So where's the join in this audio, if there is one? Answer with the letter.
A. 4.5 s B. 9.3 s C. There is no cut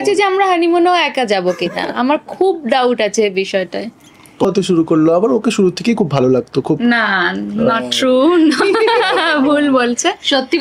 A